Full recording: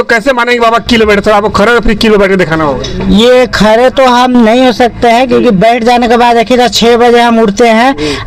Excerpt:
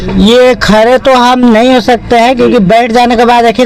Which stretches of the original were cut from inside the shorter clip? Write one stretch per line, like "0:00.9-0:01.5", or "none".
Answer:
none